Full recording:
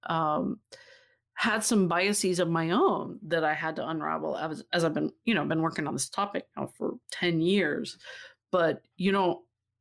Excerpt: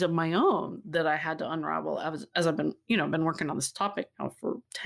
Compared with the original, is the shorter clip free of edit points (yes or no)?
yes